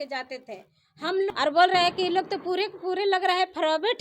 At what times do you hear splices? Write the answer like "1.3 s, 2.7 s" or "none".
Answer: 1.3 s